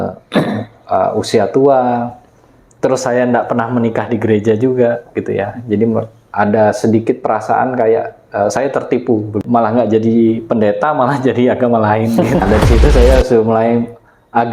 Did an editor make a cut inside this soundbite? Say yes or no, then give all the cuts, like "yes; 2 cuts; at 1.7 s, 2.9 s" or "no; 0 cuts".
yes; 2 cuts; at 9.4 s, 12.4 s